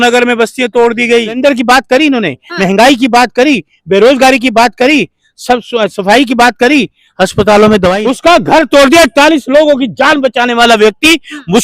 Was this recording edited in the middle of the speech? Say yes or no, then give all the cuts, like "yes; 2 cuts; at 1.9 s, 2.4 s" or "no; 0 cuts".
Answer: yes; 2 cuts; at 1.4 s, 8.0 s